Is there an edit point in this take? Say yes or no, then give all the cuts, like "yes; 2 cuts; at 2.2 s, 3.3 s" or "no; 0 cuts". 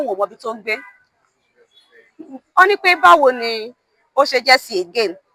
no; 0 cuts